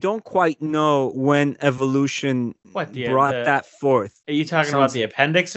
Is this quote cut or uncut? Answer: cut